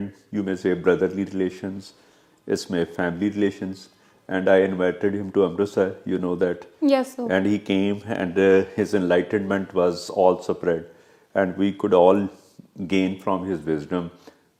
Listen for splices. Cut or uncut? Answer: uncut